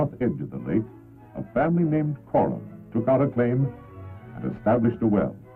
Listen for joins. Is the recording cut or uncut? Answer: cut